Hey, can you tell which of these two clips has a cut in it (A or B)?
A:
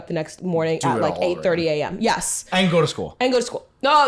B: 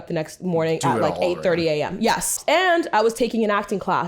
B